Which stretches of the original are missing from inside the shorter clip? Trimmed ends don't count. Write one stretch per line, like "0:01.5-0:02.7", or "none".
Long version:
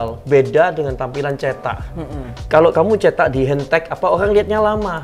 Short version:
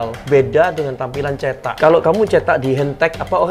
0:01.7-0:02.4